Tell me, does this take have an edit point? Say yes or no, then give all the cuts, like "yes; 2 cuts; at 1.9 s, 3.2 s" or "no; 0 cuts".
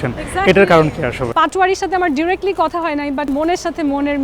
yes; 2 cuts; at 1.2 s, 3.3 s